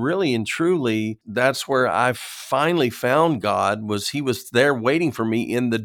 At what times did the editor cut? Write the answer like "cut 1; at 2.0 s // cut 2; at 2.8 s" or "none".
cut 1; at 1.2 s